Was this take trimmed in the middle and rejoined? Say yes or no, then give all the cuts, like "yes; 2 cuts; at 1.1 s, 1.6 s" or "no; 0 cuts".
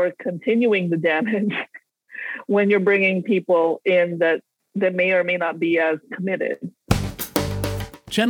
yes; 2 cuts; at 4.6 s, 6.8 s